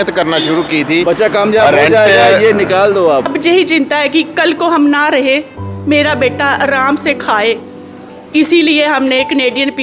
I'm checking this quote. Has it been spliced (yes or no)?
yes